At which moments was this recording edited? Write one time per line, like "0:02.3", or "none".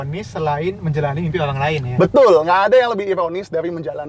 none